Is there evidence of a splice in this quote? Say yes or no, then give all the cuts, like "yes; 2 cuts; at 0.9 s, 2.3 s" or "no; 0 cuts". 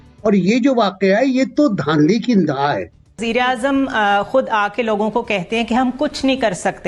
yes; 1 cut; at 3.2 s